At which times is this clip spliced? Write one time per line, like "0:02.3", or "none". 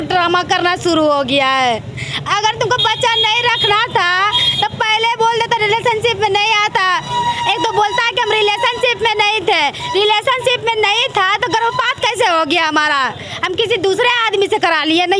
none